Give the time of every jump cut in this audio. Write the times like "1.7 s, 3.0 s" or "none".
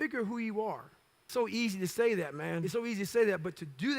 1.3 s, 2.6 s